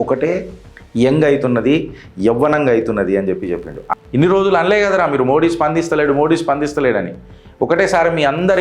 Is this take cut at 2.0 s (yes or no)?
no